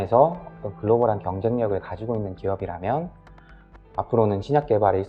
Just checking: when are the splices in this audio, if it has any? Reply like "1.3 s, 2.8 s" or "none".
none